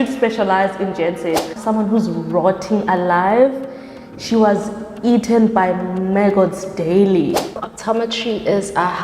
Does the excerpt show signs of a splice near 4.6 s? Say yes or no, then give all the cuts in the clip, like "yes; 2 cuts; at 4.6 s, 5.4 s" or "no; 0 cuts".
no; 2 cuts; at 1.5 s, 7.7 s